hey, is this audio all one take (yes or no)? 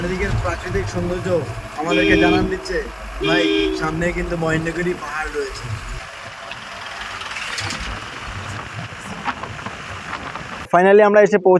yes